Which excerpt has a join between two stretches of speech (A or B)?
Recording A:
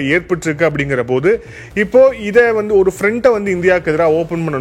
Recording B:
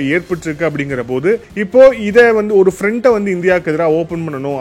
B